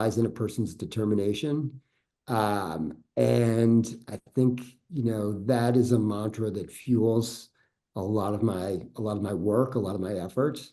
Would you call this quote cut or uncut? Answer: uncut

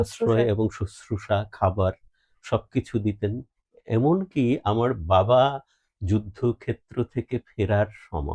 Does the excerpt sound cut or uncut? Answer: uncut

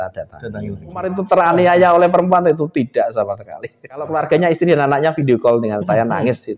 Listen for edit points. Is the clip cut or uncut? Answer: cut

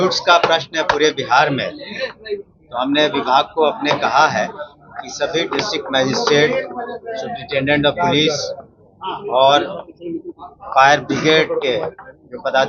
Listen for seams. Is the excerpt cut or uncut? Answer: uncut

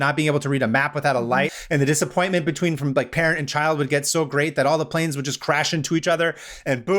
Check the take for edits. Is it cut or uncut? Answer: cut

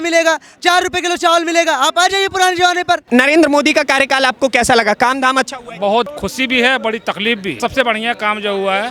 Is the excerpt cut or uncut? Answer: cut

